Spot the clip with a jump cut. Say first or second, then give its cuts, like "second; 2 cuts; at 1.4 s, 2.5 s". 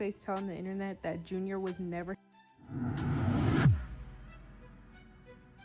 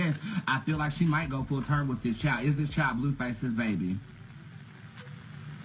first; 1 cut; at 2.2 s